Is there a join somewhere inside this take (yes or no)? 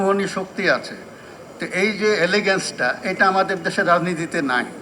no